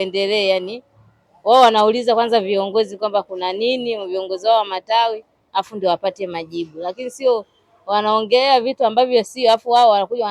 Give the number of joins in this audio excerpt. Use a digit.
0